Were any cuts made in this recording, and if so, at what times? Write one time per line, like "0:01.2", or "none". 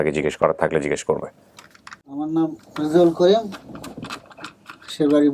0:02.0